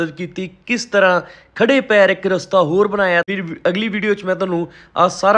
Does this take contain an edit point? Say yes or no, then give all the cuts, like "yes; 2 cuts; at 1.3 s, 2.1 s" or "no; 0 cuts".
yes; 1 cut; at 3.3 s